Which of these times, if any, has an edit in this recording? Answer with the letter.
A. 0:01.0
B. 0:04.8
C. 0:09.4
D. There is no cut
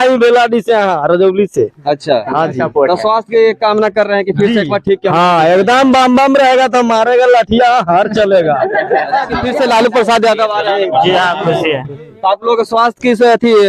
C